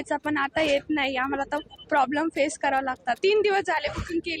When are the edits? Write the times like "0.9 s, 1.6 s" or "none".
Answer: 3.2 s